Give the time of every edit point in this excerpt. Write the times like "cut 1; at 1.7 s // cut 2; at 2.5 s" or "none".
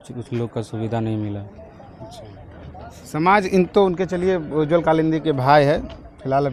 none